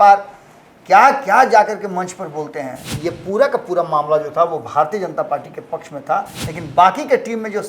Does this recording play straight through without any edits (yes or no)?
no